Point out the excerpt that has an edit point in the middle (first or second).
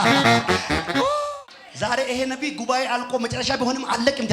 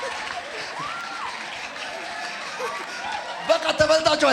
first